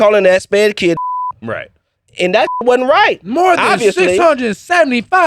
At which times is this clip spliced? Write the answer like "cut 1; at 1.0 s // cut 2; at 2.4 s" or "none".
none